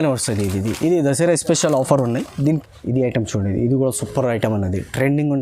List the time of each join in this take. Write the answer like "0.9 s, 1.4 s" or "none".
2.6 s